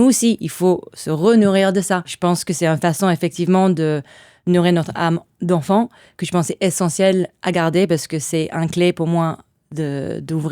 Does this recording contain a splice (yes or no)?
yes